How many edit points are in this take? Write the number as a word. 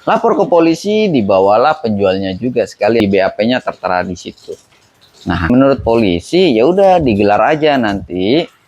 two